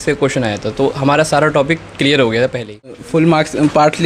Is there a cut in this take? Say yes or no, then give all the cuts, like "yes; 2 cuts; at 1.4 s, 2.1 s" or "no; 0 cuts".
yes; 1 cut; at 3.0 s